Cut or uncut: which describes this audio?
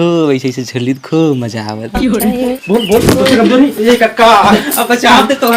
cut